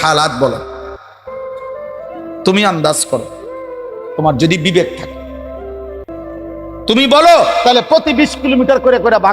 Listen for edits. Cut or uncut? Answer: cut